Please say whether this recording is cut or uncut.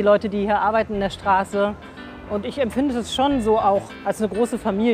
cut